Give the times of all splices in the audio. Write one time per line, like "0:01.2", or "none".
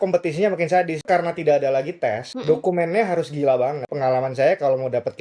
0:01.1
0:02.3
0:03.9

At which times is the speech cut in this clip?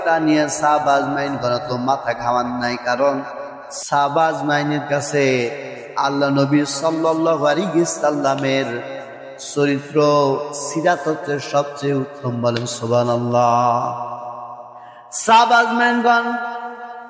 0:03.9

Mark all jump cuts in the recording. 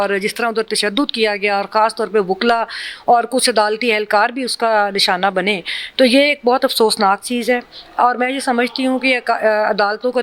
none

